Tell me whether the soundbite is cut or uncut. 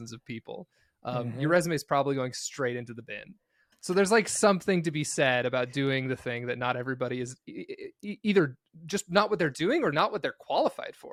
uncut